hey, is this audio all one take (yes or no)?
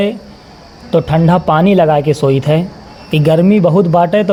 yes